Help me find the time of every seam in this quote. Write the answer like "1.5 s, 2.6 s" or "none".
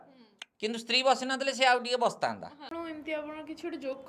2.7 s